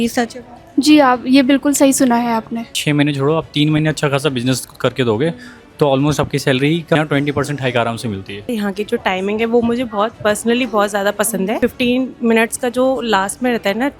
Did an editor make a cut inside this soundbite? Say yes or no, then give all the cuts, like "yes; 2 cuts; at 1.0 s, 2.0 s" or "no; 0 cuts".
yes; 4 cuts; at 2.8 s, 6.9 s, 8.5 s, 11.5 s